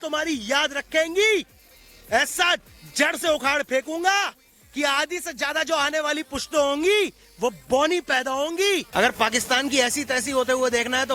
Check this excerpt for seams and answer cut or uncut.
cut